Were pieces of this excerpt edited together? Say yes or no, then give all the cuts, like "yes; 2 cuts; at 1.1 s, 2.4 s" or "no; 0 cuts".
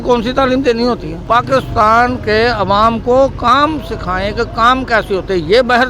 no; 0 cuts